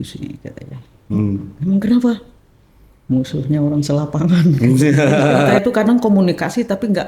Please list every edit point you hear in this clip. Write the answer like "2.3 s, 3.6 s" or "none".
5.5 s